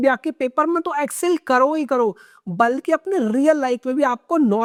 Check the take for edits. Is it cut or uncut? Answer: uncut